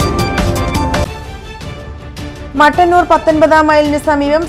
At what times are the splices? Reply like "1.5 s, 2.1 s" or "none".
1.0 s, 1.1 s